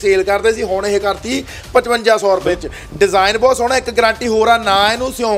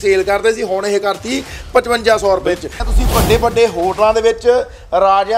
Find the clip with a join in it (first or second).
second